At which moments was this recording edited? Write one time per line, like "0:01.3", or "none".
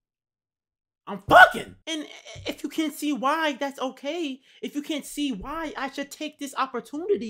0:01.8